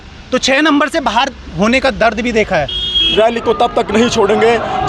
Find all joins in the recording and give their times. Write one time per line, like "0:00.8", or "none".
0:03.1